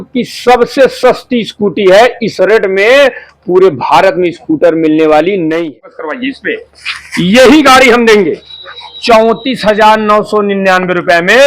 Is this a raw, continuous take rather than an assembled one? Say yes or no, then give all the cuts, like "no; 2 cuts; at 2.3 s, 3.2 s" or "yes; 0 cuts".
no; 1 cut; at 5.8 s